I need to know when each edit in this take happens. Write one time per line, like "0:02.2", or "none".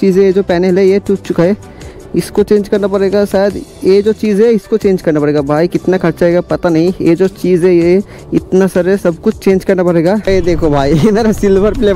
0:10.2